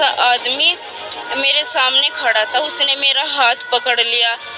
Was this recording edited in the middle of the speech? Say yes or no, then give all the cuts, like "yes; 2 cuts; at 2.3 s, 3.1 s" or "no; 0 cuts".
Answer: no; 0 cuts